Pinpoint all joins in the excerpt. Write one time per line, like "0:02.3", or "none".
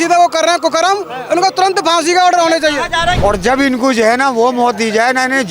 0:03.2